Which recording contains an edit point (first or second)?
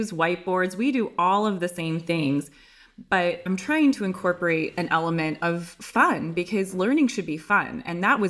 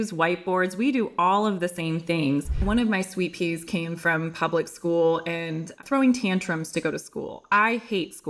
second